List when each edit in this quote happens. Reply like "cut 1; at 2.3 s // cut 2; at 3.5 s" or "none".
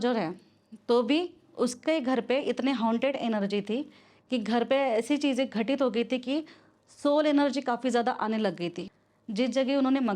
cut 1; at 8.8 s